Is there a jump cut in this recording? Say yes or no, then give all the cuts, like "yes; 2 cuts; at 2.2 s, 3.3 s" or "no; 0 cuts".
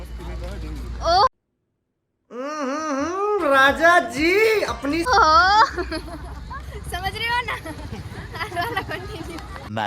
no; 0 cuts